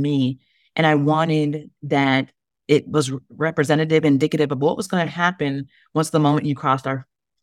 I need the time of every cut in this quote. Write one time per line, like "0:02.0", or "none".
none